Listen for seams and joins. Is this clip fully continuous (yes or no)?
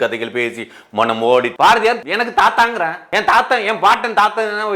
no